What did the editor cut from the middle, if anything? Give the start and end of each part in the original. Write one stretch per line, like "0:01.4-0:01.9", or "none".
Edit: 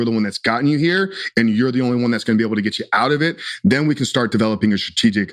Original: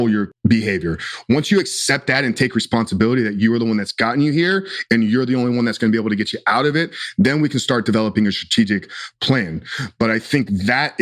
none